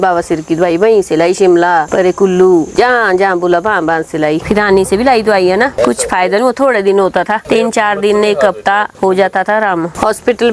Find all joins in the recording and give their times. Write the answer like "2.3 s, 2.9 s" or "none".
none